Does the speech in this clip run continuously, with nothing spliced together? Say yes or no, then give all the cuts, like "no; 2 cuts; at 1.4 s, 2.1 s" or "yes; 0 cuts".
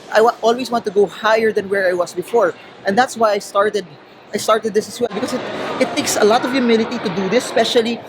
yes; 0 cuts